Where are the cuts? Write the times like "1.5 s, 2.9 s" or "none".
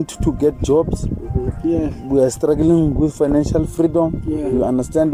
none